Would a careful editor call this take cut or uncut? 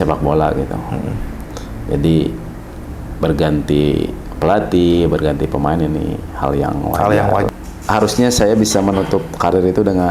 cut